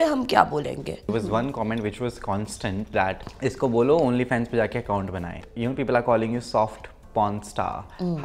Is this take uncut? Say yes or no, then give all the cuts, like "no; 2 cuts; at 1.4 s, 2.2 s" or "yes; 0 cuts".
no; 3 cuts; at 1.1 s, 3.3 s, 5.4 s